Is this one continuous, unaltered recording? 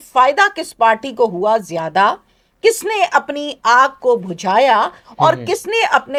yes; 0 cuts

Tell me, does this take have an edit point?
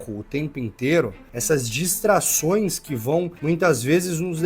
yes; 2 cuts; at 1.3 s, 3.3 s

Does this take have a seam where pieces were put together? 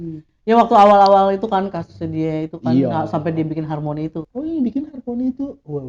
yes; 1 cut; at 4.3 s

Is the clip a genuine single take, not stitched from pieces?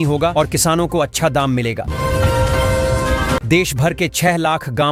yes; 0 cuts

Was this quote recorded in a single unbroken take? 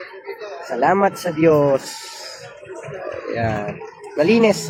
yes; 0 cuts

